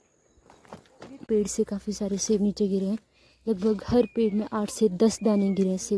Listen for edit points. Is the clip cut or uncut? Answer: cut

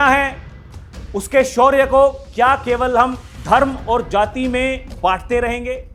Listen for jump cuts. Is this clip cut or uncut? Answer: uncut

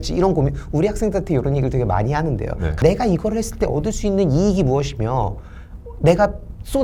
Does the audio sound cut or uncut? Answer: uncut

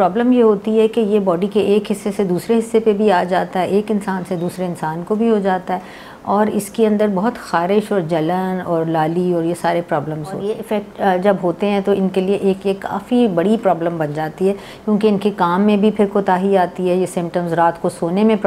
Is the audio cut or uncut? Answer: cut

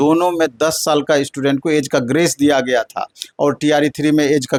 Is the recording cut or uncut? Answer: uncut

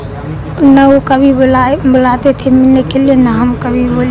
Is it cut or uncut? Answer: uncut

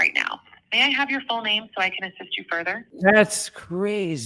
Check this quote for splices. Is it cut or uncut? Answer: cut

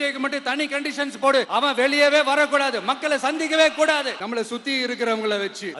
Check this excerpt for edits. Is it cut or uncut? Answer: cut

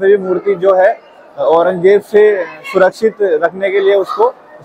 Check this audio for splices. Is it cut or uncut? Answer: uncut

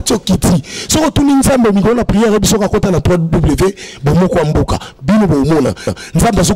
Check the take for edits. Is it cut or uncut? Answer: uncut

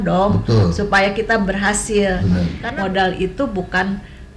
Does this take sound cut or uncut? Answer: cut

